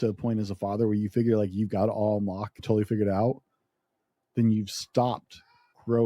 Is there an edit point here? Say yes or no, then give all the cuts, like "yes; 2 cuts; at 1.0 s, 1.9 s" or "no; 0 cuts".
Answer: yes; 1 cut; at 2.5 s